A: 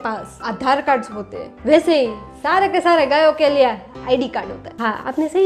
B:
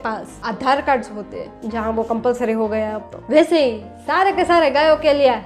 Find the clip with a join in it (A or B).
A